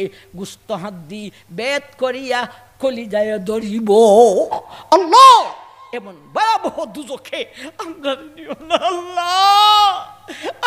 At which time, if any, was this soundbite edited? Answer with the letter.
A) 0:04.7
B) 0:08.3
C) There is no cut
A